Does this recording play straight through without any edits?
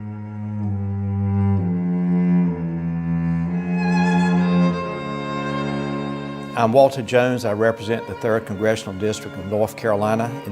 no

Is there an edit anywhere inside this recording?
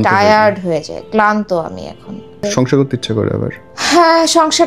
yes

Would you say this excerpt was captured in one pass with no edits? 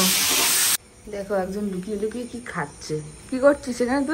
no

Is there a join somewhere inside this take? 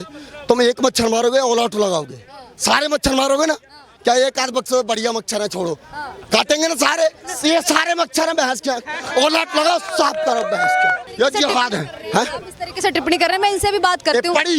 yes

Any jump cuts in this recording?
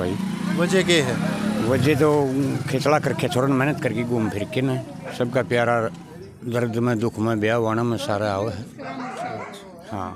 no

